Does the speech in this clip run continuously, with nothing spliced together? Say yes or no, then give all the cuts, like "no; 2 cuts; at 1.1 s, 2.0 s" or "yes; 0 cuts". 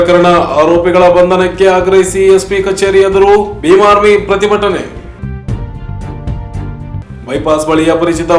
yes; 0 cuts